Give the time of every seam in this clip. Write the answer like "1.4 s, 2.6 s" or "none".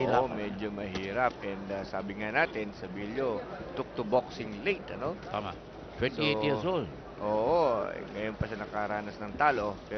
5.2 s